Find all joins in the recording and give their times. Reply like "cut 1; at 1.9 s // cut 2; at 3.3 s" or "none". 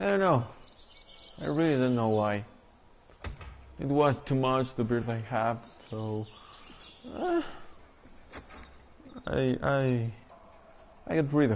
cut 1; at 1.1 s